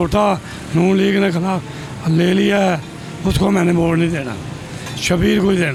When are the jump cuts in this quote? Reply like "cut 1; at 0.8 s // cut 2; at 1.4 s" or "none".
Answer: none